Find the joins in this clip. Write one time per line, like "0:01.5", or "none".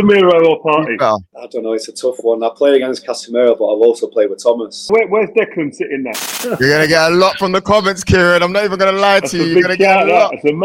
0:01.3
0:04.9
0:06.4